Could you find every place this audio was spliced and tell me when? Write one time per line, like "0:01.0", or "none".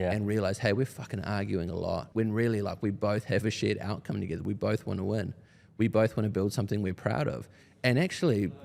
0:02.1